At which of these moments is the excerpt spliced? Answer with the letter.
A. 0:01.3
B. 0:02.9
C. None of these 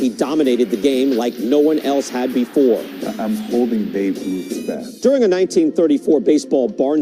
B